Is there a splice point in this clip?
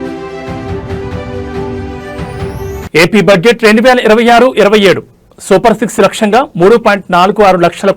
yes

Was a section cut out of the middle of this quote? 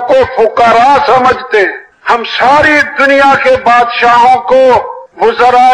no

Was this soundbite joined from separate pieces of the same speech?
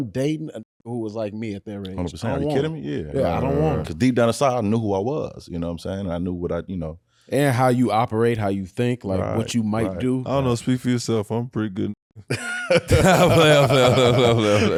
no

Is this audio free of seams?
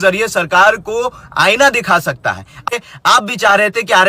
no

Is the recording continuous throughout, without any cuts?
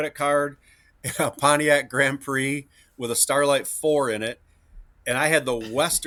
yes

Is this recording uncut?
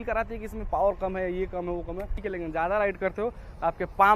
no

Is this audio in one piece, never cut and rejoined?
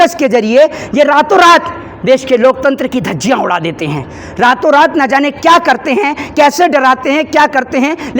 yes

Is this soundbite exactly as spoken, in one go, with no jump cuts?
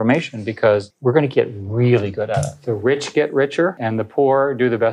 no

